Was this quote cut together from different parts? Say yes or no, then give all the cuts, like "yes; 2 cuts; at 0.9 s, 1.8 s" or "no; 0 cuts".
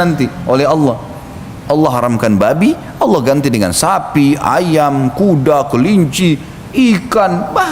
yes; 1 cut; at 1.8 s